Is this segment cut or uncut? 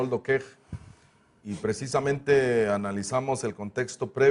uncut